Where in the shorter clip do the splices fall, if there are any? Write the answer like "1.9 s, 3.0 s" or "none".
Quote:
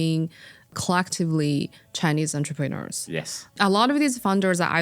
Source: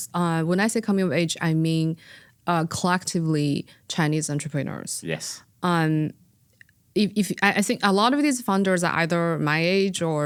0.7 s, 3.6 s

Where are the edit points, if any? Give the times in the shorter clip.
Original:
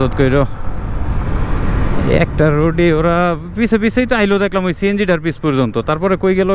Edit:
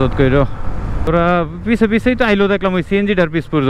1.1 s

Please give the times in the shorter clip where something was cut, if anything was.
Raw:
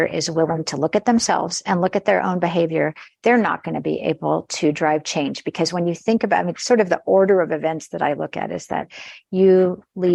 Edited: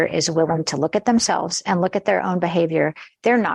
none

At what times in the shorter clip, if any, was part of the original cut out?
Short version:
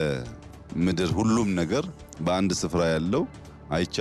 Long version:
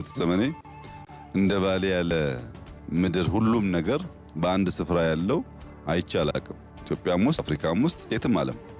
none

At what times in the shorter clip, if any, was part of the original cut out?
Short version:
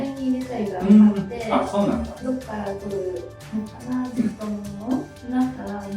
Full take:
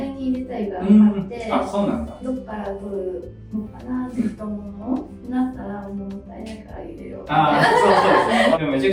none

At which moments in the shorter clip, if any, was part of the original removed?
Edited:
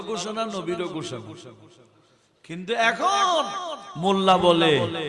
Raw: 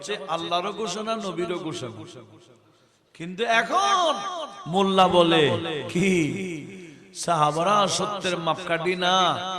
none

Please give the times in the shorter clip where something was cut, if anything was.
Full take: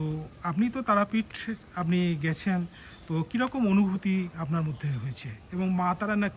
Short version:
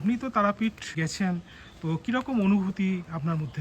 0.9 s

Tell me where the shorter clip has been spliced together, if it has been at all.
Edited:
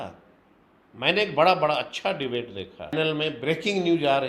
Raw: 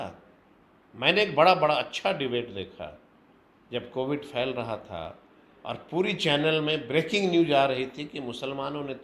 2.9 s

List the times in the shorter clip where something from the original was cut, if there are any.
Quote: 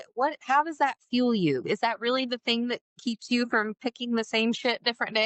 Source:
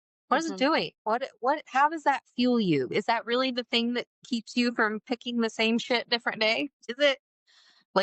none

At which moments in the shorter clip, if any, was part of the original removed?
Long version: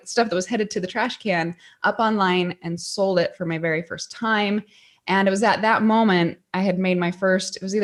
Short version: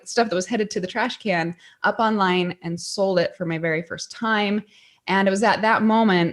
none

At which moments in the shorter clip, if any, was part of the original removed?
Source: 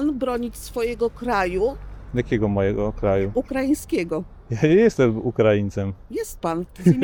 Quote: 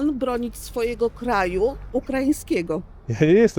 1.9 s

